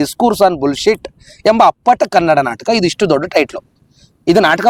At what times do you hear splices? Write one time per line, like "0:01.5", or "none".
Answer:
none